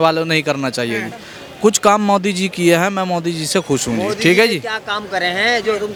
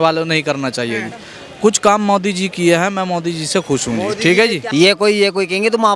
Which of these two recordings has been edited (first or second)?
second